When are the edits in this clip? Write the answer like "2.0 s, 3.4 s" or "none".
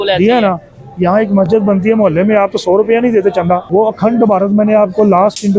3.7 s